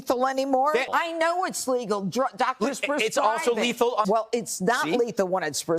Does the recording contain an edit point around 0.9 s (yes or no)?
yes